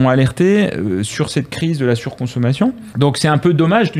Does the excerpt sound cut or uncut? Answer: cut